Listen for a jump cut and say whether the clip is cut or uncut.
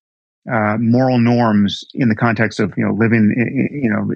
uncut